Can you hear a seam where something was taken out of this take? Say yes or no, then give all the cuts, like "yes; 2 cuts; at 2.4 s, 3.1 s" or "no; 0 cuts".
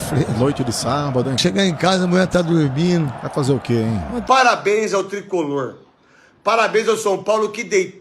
yes; 1 cut; at 4.2 s